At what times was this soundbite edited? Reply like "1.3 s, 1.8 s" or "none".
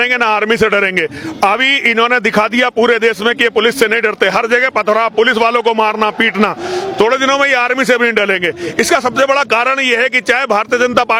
none